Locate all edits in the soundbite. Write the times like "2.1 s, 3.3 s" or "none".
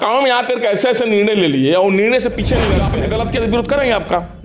2.9 s